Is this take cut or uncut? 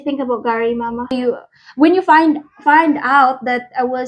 cut